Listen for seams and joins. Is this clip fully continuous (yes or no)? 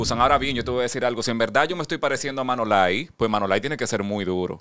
yes